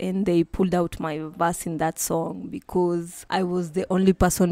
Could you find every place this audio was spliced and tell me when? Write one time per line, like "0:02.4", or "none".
0:03.2